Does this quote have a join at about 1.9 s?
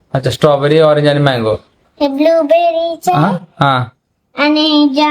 yes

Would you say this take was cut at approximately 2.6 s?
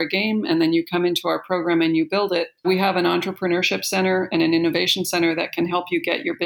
yes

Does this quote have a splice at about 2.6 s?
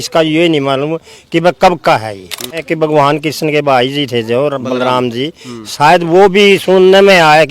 yes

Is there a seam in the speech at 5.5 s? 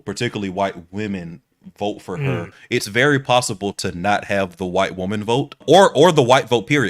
yes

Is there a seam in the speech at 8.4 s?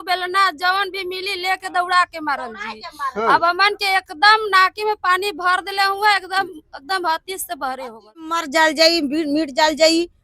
yes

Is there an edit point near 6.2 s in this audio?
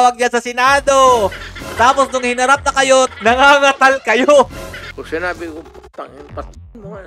no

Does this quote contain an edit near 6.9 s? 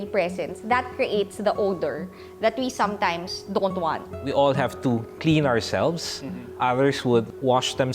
no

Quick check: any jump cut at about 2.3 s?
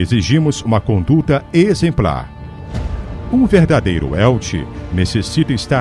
yes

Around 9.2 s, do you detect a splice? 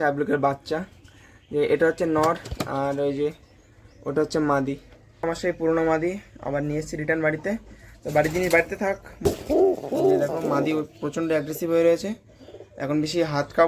yes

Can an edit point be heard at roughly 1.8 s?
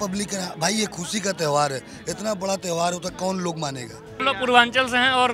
no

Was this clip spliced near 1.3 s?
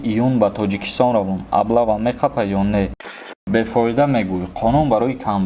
no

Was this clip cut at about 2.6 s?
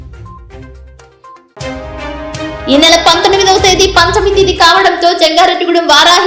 yes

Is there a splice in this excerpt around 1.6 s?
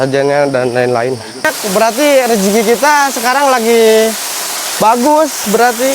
yes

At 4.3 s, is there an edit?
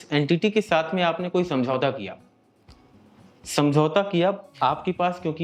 no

